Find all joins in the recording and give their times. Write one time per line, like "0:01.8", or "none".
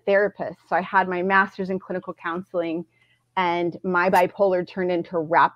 none